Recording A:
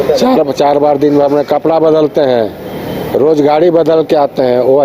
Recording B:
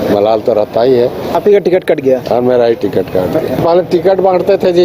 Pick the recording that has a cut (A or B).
B